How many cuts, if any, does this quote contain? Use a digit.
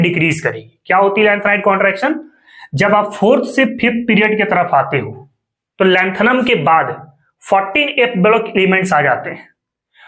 0